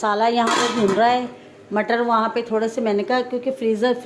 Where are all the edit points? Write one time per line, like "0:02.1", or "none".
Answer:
none